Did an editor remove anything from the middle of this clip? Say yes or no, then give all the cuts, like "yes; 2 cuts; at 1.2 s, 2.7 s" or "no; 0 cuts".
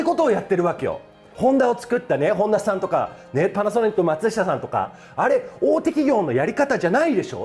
yes; 1 cut; at 1.3 s